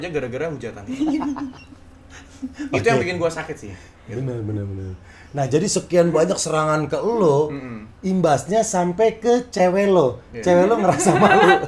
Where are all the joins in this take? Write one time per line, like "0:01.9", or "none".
none